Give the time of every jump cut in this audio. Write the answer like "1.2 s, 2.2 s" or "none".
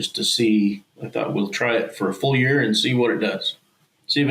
0.9 s